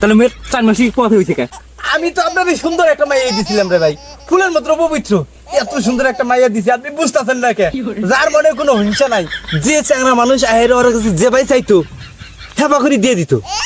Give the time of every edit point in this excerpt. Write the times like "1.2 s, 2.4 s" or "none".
1.5 s